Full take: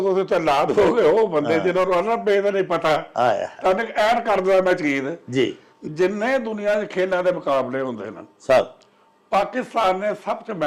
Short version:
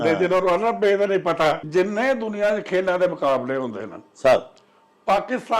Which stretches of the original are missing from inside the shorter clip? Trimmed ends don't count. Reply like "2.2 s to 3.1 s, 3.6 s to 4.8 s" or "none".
3.1 s to 5.9 s